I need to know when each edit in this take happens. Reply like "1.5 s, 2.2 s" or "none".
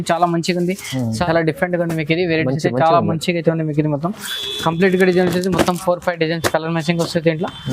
1.2 s

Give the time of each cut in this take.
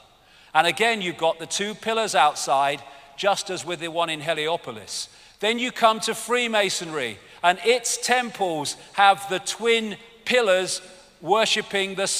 9.1 s

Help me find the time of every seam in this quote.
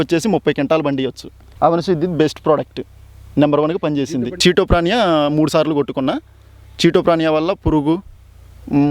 4.3 s

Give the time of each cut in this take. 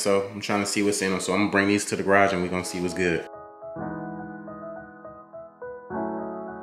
none

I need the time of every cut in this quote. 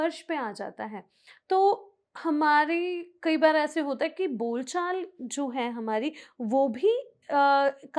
none

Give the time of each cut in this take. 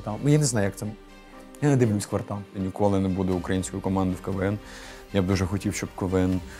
2.6 s

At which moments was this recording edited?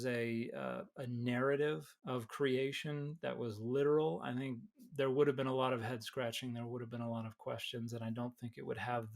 1.9 s

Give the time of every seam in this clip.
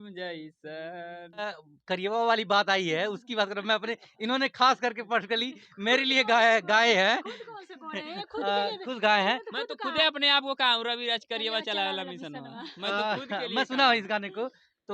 1.7 s

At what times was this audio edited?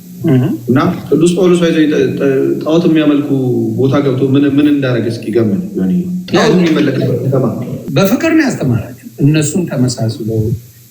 6.2 s, 7.7 s

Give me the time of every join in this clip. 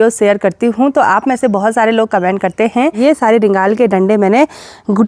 3.0 s

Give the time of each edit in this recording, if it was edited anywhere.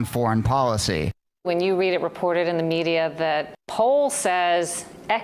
1.4 s, 3.6 s

